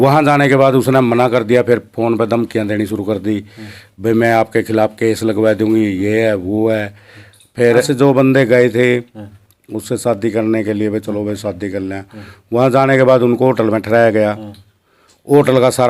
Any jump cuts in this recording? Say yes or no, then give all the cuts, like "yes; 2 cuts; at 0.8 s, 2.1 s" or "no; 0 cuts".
yes; 1 cut; at 7.9 s